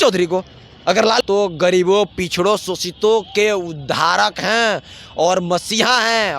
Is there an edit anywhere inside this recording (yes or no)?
yes